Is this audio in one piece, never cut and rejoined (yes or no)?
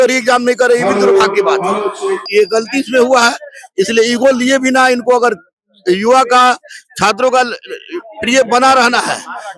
no